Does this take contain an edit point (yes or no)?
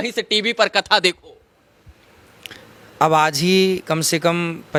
no